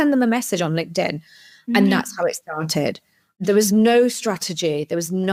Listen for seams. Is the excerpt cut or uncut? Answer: uncut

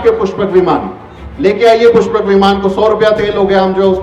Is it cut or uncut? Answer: uncut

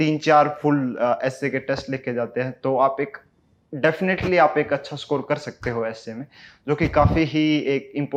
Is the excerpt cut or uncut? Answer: uncut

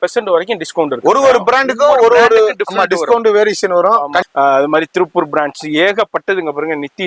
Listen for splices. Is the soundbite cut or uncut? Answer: cut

